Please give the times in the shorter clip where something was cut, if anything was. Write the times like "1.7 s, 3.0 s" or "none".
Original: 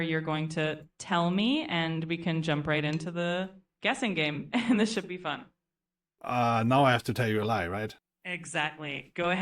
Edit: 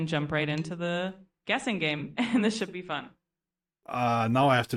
none